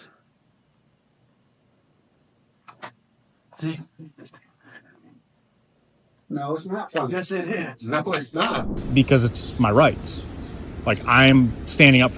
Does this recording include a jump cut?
yes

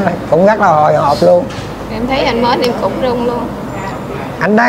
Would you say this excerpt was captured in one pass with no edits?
yes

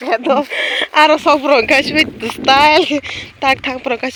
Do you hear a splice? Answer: no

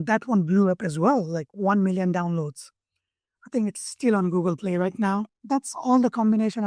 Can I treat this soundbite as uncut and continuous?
no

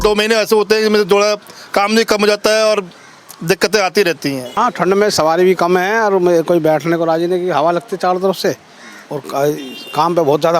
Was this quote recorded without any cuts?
yes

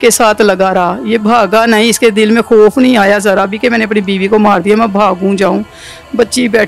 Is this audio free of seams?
yes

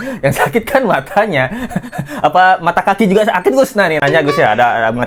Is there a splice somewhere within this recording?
no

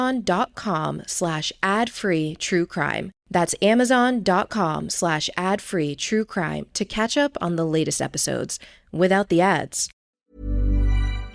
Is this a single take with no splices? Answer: no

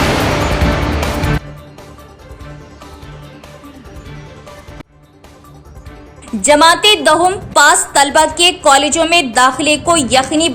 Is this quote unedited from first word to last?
no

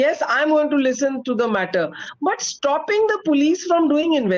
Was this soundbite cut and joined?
no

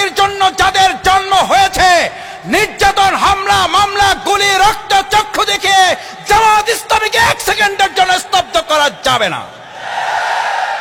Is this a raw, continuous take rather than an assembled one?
yes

